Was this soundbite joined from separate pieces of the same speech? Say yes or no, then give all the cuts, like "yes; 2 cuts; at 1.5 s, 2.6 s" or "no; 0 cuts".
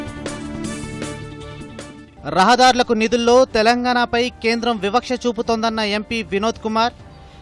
no; 0 cuts